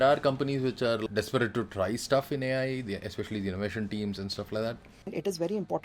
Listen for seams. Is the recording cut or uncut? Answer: cut